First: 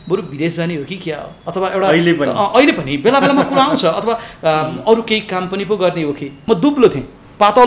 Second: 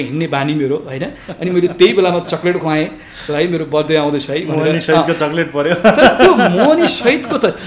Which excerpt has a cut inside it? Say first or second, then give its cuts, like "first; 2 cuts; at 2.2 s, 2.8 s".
first; 1 cut; at 6.4 s